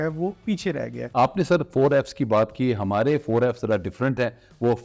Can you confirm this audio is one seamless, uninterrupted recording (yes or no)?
no